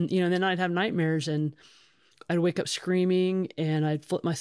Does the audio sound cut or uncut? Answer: uncut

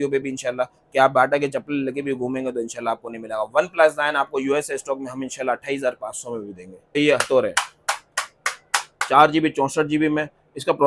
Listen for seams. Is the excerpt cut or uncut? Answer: cut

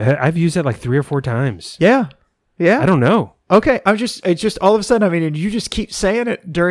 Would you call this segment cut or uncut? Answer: uncut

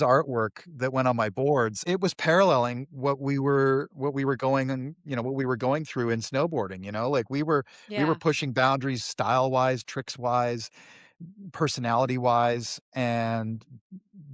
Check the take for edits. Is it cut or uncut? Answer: cut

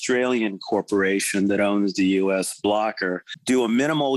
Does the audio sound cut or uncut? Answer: cut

